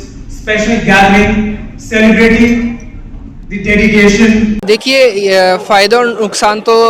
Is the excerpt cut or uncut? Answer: cut